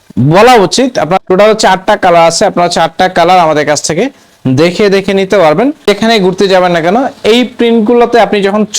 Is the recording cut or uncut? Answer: cut